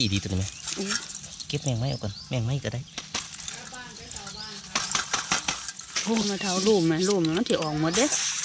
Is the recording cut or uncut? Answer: uncut